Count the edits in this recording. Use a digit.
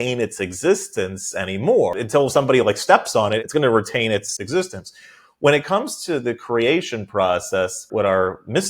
4